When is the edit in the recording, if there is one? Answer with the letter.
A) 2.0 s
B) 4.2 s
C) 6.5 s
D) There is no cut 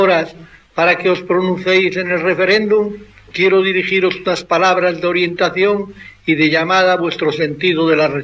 C